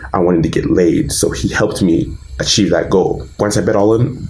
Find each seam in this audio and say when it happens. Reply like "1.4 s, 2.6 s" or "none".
none